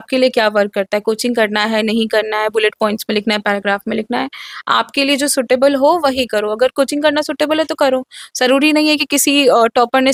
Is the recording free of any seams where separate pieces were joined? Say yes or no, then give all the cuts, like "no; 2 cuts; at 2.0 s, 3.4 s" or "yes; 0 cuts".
yes; 0 cuts